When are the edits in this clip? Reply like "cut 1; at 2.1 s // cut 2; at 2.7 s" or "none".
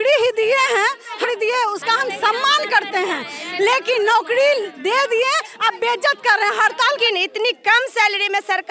cut 1; at 1.2 s // cut 2; at 7.0 s

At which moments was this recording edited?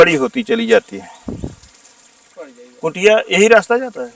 cut 1; at 2.4 s

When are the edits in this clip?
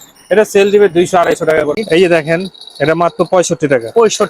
cut 1; at 1.7 s

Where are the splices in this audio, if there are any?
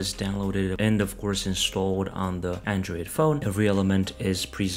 cut 1; at 3.4 s

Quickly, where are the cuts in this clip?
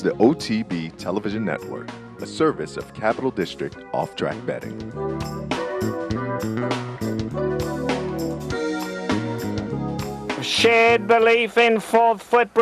cut 1; at 10.5 s

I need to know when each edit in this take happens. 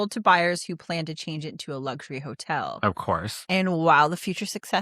cut 1; at 3.3 s

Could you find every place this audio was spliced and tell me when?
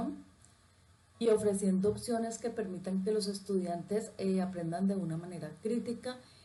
none

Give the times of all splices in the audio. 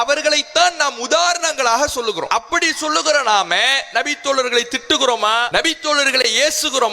cut 1; at 2.3 s // cut 2; at 6.0 s

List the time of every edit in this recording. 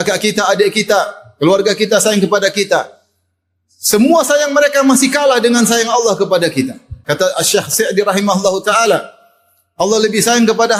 cut 1; at 6.9 s

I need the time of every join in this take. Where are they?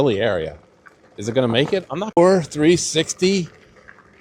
cut 1; at 2.2 s

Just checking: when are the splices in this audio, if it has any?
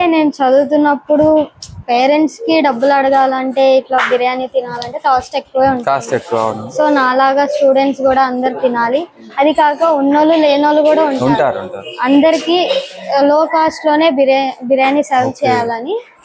none

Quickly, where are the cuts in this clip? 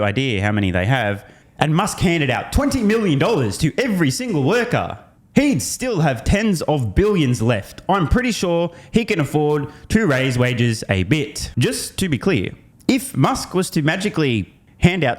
cut 1; at 1.4 s // cut 2; at 11.4 s

